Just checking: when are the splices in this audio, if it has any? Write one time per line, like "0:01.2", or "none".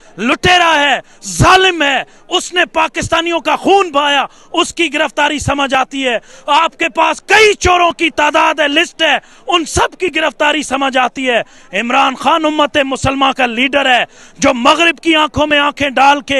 none